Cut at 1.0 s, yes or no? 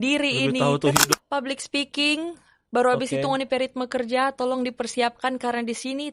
yes